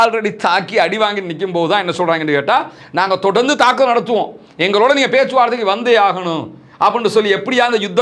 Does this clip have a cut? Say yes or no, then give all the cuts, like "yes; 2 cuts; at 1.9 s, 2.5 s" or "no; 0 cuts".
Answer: no; 0 cuts